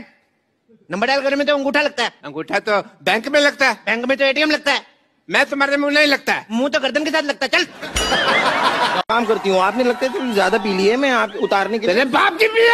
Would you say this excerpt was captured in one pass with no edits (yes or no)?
no